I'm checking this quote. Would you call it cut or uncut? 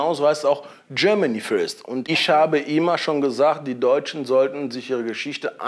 cut